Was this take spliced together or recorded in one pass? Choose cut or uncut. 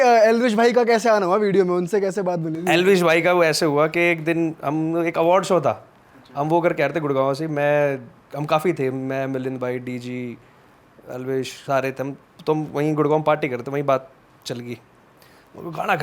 uncut